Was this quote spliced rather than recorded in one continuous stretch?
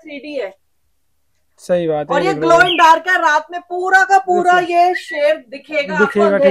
no; 0 cuts

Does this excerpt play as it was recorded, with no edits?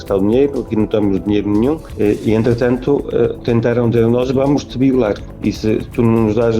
no; 2 cuts; at 1.9 s, 5.3 s

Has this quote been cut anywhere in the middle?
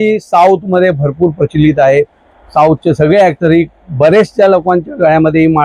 no; 0 cuts

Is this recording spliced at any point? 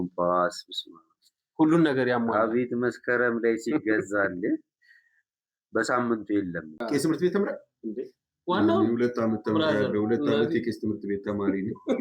yes; 1 cut; at 6.8 s

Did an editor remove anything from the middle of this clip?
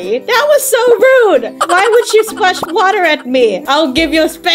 yes; 1 cut; at 2.7 s

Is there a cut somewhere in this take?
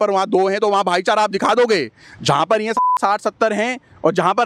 no; 0 cuts

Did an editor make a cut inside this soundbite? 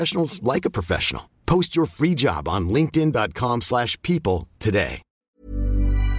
yes; 1 cut; at 5.1 s

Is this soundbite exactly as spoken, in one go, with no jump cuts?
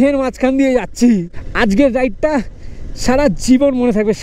yes; 0 cuts

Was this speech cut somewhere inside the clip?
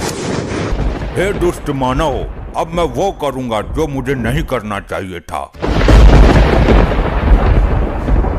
yes; 2 cuts; at 0.7 s, 5.5 s

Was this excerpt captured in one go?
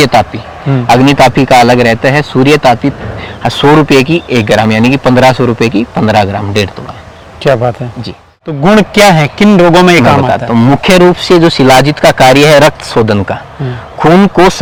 yes; 0 cuts

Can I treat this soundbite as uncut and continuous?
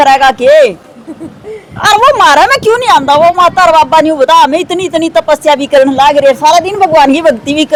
yes; 0 cuts

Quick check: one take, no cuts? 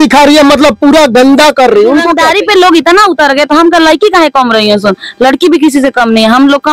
no; 1 cut; at 2.2 s

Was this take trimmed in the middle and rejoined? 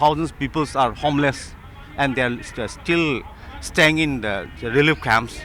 no; 0 cuts

